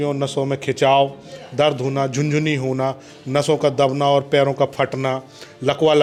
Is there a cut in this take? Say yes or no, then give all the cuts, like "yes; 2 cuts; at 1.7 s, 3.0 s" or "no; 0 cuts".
no; 0 cuts